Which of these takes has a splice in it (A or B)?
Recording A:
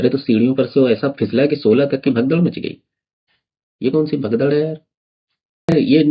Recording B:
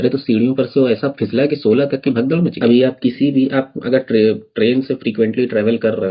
B